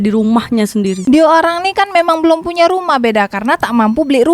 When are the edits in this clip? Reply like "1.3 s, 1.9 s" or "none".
1.0 s